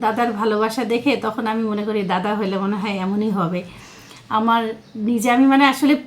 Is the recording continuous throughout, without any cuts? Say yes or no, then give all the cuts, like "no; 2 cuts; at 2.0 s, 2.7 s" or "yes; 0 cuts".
yes; 0 cuts